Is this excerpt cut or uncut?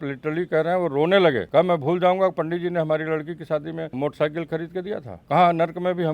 cut